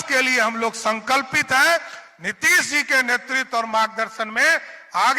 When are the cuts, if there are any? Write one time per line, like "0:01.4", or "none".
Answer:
none